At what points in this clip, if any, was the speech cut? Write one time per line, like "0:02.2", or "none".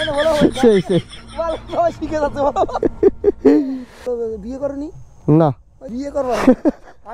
0:04.0